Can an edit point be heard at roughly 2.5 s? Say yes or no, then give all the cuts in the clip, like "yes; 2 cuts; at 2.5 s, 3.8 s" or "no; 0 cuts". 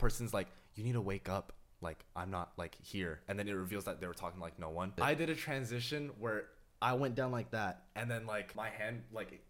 no; 2 cuts; at 4.9 s, 8.5 s